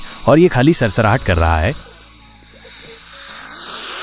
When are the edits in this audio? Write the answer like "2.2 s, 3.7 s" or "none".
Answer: none